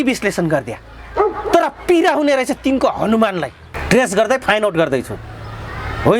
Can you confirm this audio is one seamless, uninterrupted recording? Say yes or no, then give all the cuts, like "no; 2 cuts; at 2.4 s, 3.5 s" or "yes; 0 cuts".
no; 1 cut; at 3.7 s